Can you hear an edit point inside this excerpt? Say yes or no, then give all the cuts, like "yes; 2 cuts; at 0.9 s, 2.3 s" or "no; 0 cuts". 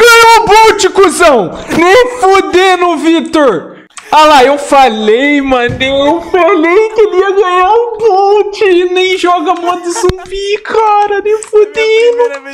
no; 0 cuts